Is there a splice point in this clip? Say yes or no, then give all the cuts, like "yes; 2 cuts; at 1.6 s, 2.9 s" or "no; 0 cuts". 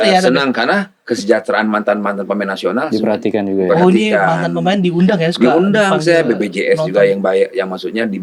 no; 0 cuts